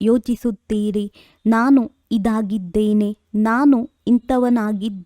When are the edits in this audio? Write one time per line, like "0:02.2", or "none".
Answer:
0:02.2

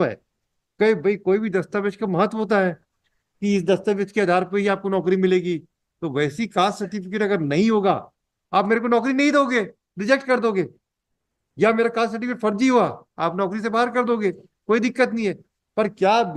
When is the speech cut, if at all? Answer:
none

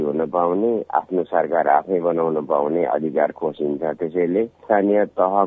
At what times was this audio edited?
0:04.6

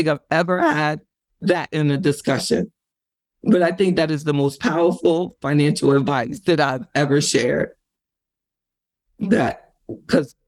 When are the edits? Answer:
none

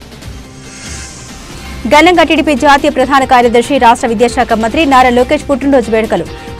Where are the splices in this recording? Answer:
0:01.4

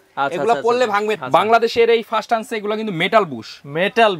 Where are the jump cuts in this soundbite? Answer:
0:01.2

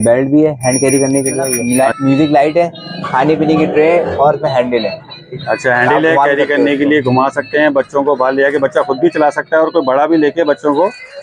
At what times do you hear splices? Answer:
0:01.6

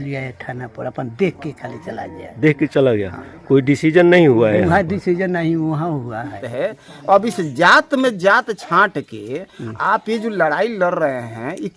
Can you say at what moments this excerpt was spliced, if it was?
0:06.4

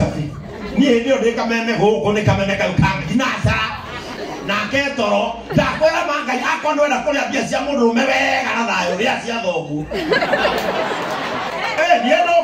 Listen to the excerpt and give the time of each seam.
0:11.5

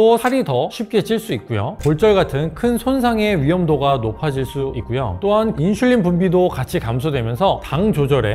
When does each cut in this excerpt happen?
0:01.8
0:05.5

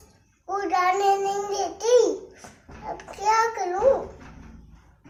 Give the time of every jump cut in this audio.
none

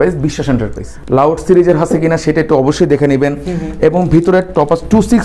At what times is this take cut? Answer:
0:00.9

